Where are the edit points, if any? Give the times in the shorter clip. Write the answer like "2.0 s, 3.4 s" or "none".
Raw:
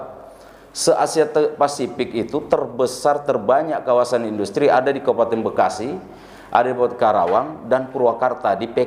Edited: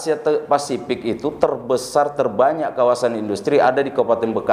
none